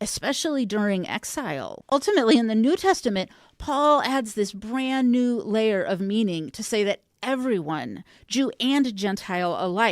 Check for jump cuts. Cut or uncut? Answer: cut